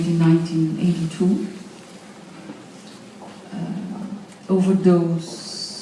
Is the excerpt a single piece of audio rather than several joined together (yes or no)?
no